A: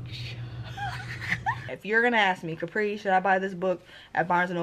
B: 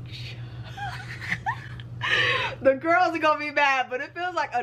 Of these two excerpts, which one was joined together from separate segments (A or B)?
A